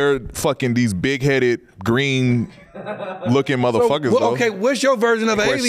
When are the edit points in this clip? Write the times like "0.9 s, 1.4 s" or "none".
none